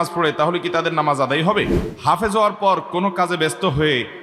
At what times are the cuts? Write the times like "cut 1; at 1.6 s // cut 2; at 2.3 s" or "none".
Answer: cut 1; at 1.8 s